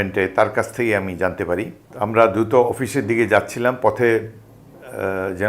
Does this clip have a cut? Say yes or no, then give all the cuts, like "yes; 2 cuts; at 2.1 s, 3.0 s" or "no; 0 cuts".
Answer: yes; 1 cut; at 1.8 s